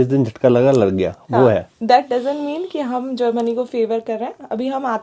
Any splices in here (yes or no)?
no